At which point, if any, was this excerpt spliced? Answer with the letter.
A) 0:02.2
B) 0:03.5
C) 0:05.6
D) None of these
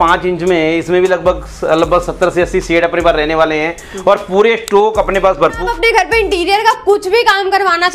C